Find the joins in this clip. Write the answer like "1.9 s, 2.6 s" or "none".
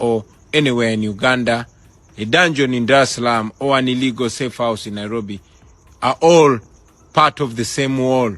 7.2 s